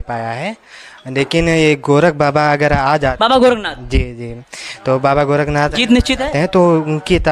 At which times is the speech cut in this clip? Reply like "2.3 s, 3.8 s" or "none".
none